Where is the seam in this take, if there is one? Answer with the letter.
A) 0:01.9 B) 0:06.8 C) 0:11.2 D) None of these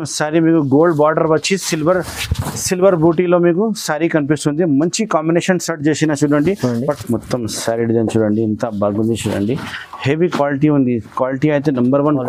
B